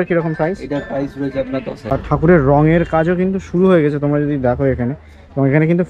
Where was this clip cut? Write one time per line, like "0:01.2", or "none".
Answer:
0:02.0

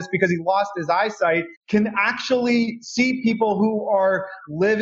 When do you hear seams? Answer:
0:01.5

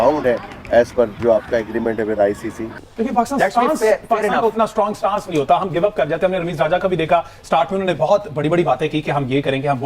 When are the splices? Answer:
0:02.7

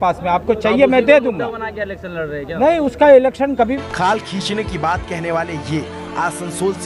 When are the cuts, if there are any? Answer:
0:03.8

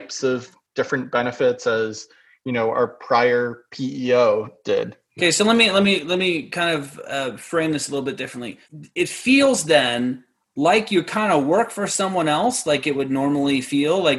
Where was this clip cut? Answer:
none

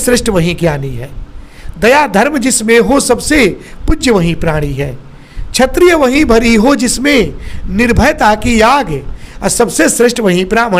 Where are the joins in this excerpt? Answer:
none

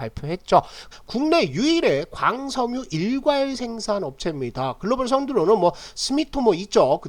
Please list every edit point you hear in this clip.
0:00.9

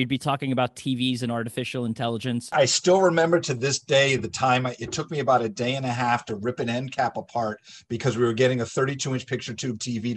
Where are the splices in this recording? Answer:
0:02.5

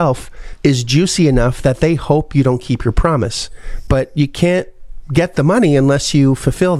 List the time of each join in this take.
none

